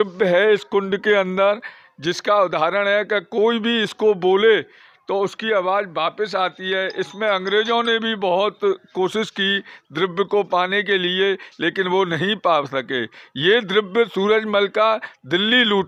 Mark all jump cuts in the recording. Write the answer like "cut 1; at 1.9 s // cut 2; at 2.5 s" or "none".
none

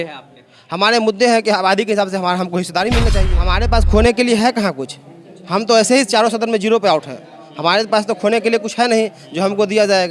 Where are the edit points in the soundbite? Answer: cut 1; at 3.3 s

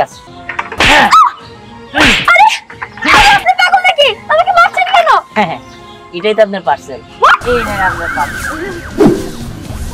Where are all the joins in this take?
cut 1; at 7.4 s

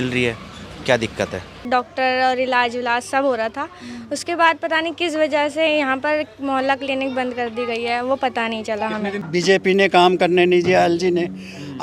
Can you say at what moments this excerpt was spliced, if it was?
cut 1; at 1.7 s // cut 2; at 9.2 s

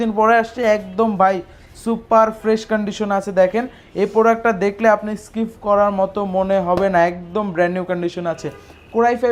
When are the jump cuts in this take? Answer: none

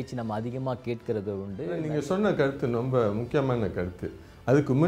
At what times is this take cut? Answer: cut 1; at 1.8 s

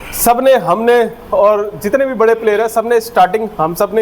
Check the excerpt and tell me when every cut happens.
none

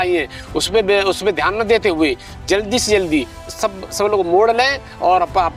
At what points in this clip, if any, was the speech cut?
none

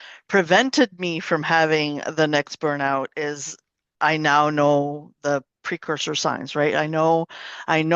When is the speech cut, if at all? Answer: none

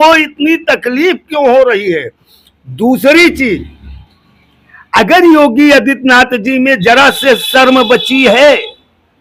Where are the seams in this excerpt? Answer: none

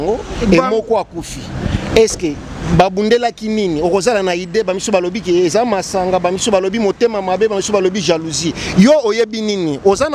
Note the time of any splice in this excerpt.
none

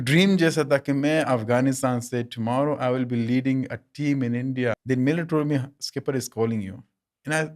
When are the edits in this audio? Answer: cut 1; at 4.8 s

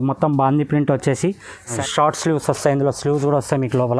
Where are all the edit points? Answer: cut 1; at 1.7 s

